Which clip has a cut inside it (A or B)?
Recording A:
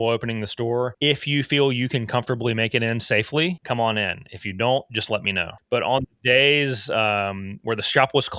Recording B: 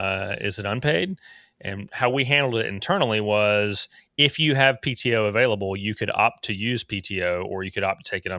A